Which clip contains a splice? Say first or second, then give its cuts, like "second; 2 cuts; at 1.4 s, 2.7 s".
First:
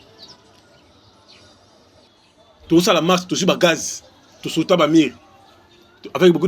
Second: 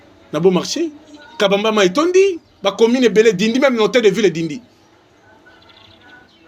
first; 1 cut; at 2.1 s